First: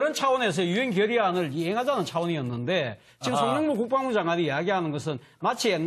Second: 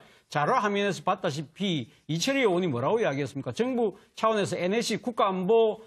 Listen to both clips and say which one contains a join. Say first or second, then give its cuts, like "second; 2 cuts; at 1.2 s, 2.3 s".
first; 1 cut; at 4.5 s